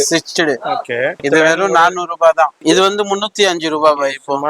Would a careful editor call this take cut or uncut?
cut